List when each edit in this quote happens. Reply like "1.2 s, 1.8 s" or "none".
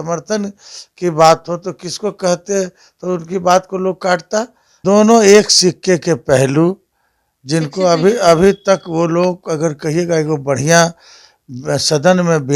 4.7 s